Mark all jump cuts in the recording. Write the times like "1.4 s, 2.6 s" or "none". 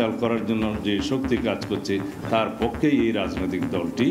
none